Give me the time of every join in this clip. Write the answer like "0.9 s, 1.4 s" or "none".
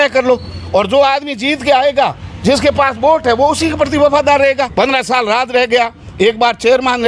4.7 s